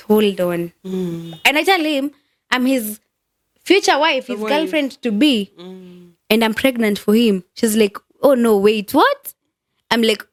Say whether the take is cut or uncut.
uncut